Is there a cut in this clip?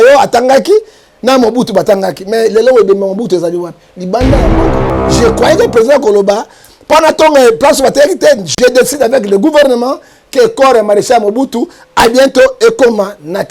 no; 0 cuts

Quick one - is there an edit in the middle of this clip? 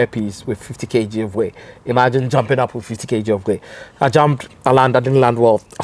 no; 0 cuts

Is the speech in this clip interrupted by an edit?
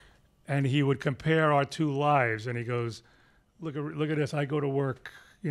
no; 0 cuts

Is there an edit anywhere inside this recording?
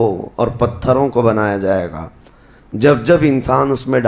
no; 0 cuts

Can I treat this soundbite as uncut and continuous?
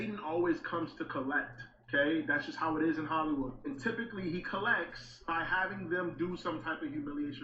yes; 0 cuts

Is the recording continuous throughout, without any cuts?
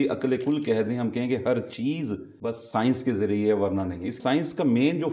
no; 2 cuts; at 2.3 s, 4.2 s

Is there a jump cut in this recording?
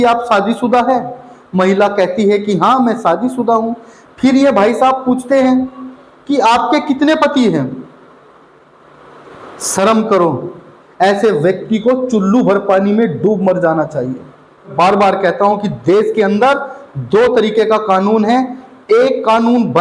yes; 1 cut; at 14.7 s

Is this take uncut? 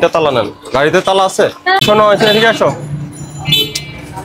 no; 1 cut; at 1.8 s

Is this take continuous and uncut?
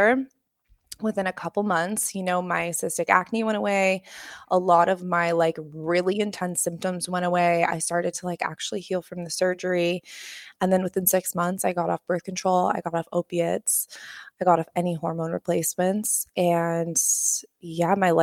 yes; 0 cuts

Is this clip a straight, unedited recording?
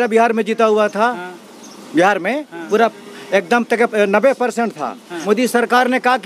no; 1 cut; at 5.1 s

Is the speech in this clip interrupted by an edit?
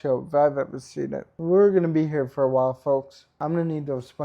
yes; 2 cuts; at 1.3 s, 3.3 s

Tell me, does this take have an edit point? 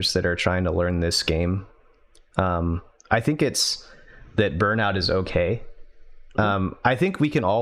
no; 0 cuts

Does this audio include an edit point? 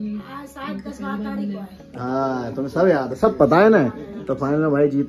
no; 0 cuts

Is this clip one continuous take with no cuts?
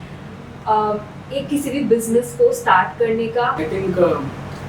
yes; 0 cuts

